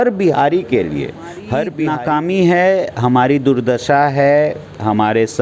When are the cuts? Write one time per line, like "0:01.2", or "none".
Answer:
0:01.8